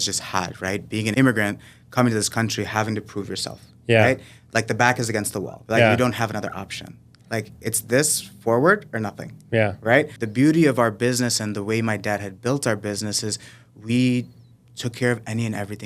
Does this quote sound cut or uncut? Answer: cut